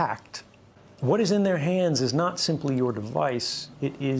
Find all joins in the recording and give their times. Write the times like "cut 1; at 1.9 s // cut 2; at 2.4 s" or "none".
none